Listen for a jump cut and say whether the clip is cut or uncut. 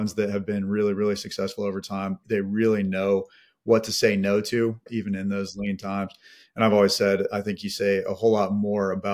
cut